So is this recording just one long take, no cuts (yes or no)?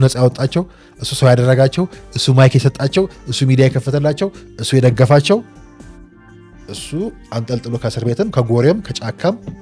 yes